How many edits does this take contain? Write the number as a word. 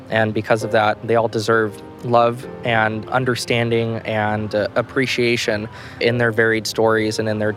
zero